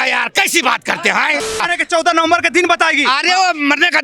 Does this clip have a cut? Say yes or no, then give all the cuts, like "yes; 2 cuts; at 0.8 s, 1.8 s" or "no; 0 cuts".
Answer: yes; 1 cut; at 1.6 s